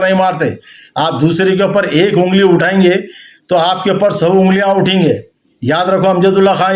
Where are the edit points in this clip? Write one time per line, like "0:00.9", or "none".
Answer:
none